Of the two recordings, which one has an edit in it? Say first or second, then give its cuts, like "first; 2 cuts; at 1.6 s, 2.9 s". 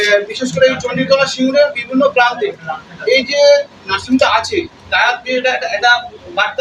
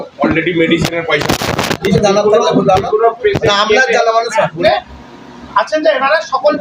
second; 2 cuts; at 1.8 s, 4.6 s